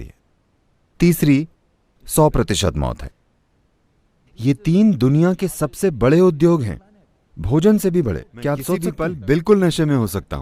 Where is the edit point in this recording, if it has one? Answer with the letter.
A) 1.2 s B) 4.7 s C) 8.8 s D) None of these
C